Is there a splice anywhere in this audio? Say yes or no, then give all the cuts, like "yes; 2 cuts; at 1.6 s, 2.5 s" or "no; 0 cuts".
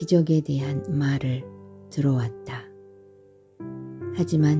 no; 0 cuts